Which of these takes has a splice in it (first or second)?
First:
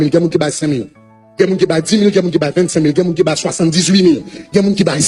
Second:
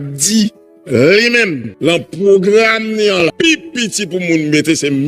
second